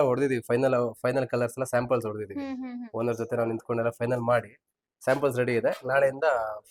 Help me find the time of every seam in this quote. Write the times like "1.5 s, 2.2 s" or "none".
none